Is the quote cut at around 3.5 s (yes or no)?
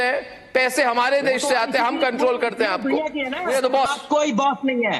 yes